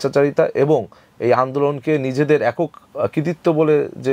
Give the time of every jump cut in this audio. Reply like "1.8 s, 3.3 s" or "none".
none